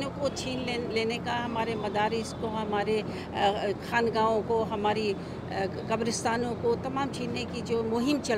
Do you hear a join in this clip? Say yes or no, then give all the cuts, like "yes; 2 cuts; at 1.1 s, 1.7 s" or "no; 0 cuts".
no; 0 cuts